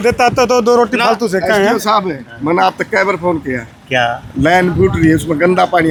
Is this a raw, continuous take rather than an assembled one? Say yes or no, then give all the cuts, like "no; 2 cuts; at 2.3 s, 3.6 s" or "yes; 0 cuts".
yes; 0 cuts